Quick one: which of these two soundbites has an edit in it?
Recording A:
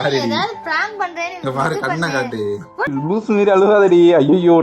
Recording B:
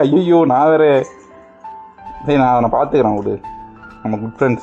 A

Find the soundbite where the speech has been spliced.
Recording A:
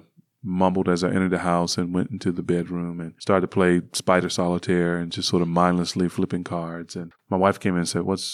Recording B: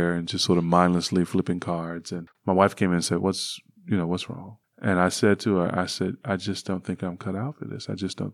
A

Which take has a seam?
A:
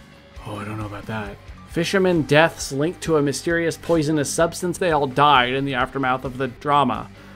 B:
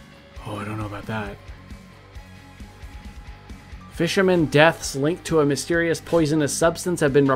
A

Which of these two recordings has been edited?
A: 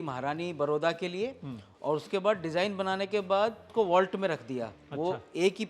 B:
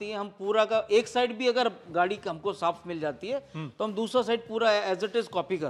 A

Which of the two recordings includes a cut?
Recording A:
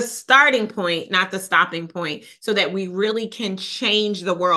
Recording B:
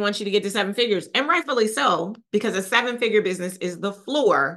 B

